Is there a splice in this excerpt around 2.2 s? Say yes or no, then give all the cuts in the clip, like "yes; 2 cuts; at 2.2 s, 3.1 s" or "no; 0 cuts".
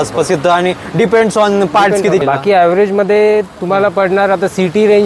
yes; 1 cut; at 2.2 s